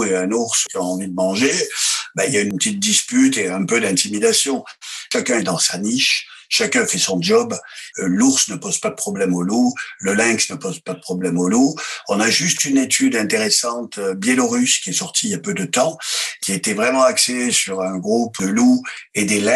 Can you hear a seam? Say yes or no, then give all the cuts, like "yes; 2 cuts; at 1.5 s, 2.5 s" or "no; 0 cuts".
yes; 2 cuts; at 5.1 s, 7.8 s